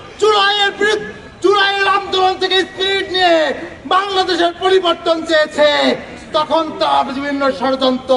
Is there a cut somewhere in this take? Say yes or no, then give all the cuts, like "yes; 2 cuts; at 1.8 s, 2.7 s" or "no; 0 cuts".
no; 0 cuts